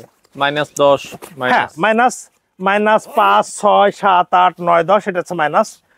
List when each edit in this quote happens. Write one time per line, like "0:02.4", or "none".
none